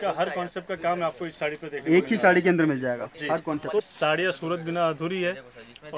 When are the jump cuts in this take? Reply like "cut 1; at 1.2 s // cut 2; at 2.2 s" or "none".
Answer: cut 1; at 3.8 s